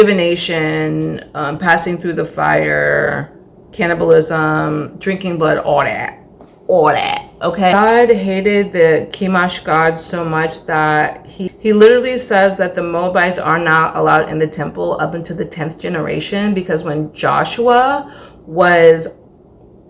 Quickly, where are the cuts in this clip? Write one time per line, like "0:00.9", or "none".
none